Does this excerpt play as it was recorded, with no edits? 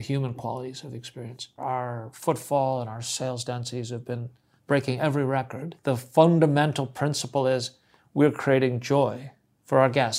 no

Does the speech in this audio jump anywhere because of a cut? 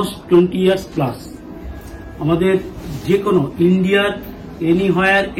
no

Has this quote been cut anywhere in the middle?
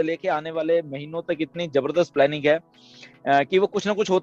no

